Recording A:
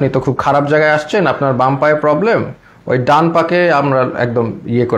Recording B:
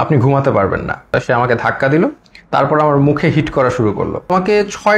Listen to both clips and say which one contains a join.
B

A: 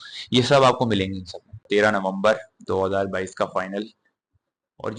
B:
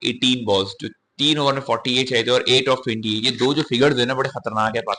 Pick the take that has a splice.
A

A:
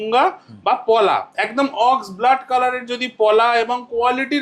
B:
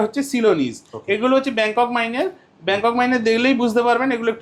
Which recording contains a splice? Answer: A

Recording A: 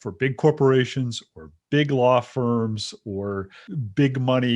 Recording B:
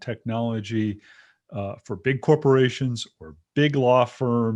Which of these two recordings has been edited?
A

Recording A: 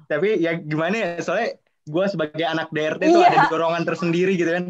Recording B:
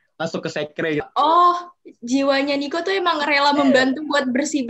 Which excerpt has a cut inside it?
B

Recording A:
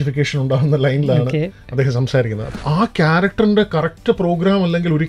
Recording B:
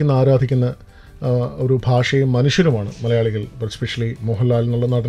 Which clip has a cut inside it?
A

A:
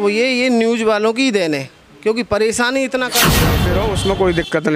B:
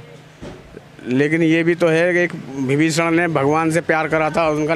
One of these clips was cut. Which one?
A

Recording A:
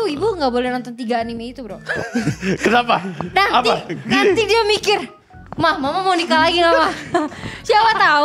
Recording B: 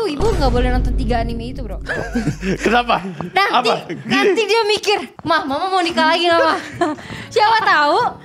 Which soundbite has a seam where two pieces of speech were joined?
B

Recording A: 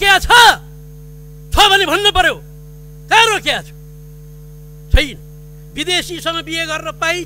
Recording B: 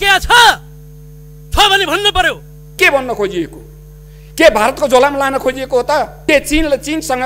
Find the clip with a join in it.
B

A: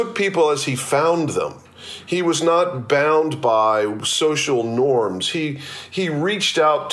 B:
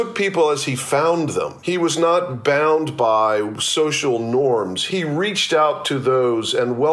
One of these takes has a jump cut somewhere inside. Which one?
B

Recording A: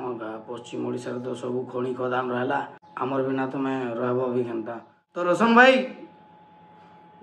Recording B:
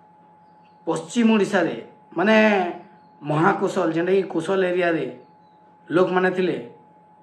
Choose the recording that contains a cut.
A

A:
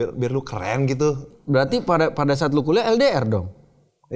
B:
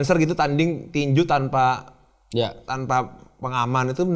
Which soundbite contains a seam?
A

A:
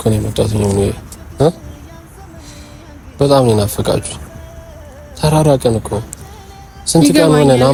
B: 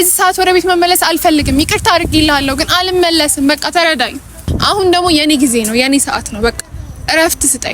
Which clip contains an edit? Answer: B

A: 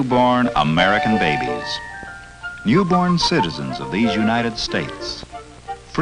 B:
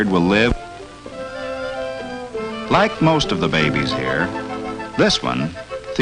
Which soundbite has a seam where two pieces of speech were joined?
A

